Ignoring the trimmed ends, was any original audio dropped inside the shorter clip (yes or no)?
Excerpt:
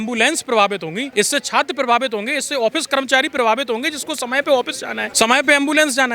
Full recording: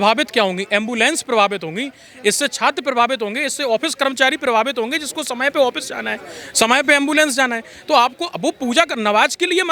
yes